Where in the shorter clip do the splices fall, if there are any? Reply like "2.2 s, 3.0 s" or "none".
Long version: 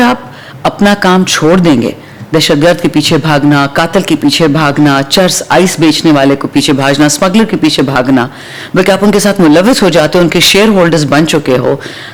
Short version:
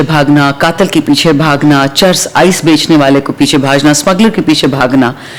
none